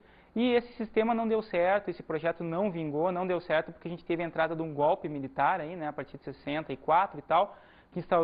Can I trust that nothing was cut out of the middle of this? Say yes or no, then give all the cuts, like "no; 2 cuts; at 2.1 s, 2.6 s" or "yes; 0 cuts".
yes; 0 cuts